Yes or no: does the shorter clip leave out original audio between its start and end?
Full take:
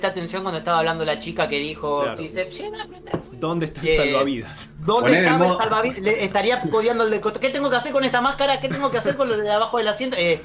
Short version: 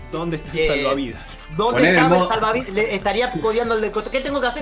no